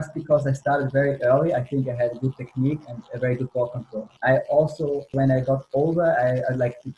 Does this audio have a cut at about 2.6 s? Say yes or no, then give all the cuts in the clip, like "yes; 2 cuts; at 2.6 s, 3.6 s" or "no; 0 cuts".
no; 1 cut; at 4.0 s